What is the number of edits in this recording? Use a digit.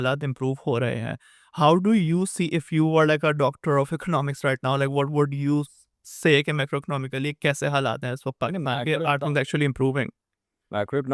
0